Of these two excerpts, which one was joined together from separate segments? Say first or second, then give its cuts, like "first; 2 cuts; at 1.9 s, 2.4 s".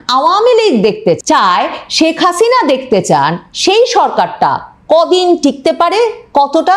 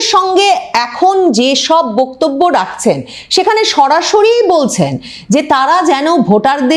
first; 1 cut; at 1.2 s